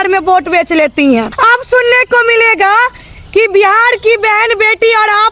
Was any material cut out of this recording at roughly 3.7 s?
no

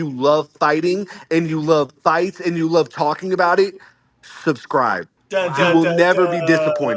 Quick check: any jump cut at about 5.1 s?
yes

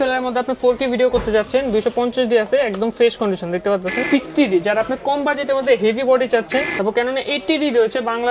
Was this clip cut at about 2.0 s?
no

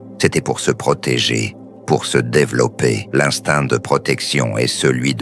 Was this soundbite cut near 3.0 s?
yes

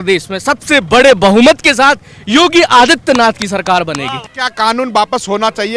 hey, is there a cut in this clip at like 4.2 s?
yes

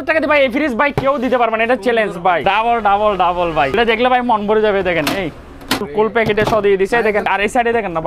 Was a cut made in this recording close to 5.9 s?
yes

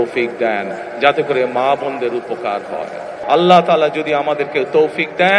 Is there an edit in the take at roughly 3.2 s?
yes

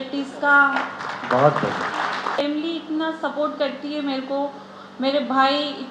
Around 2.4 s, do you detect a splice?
yes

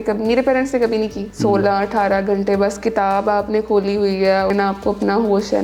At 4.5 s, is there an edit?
yes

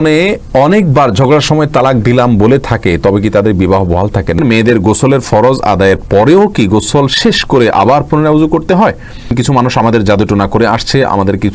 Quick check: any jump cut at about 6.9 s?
no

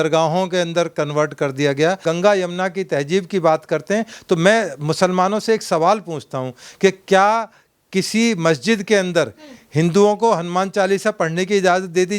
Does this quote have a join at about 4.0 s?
no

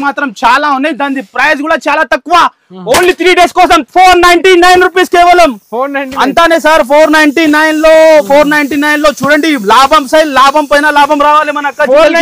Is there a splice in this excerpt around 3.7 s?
no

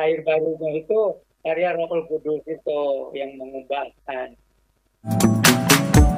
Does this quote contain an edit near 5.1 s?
yes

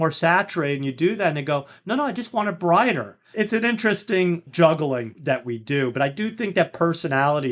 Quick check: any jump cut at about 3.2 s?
yes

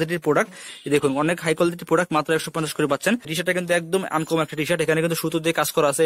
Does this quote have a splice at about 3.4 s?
yes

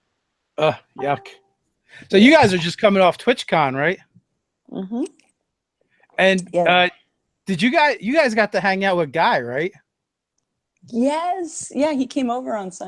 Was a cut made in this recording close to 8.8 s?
yes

